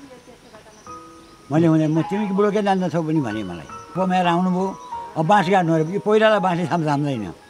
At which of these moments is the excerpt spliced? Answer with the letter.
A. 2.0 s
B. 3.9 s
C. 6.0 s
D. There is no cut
B